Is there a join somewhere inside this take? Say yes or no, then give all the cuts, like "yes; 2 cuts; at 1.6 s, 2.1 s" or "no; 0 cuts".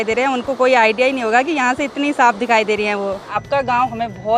yes; 1 cut; at 3.3 s